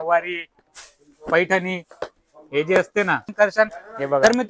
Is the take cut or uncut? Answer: cut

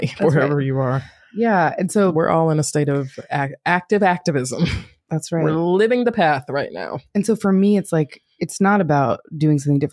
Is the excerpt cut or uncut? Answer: uncut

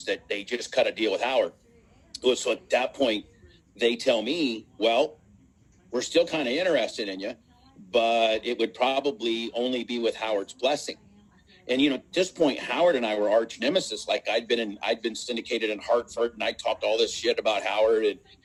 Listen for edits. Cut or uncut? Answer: uncut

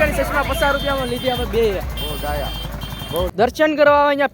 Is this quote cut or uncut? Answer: cut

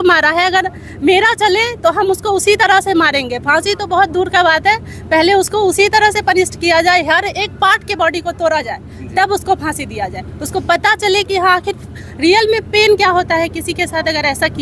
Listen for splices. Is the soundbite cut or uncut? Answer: uncut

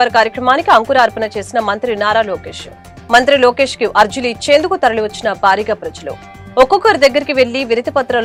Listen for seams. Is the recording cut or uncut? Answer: uncut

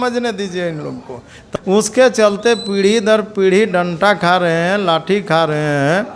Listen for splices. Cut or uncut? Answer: cut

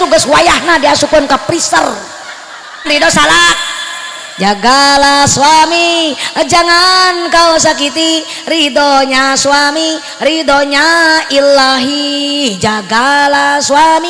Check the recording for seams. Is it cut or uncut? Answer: cut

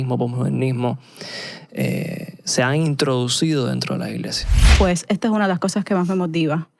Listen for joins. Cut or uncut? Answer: cut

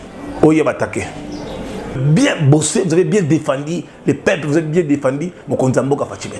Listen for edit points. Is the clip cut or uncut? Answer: cut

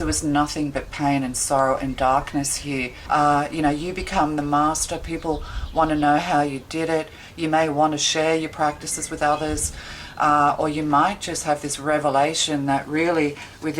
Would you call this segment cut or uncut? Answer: cut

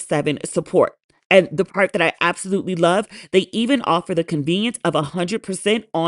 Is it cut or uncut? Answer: uncut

